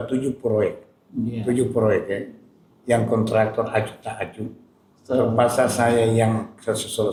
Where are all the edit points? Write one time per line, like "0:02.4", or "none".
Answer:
none